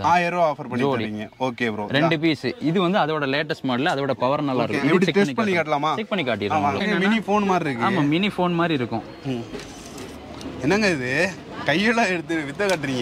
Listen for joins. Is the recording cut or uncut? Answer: cut